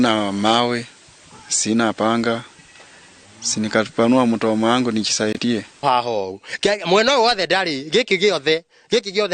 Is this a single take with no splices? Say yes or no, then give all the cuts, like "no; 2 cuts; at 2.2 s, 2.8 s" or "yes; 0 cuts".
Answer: no; 1 cut; at 5.8 s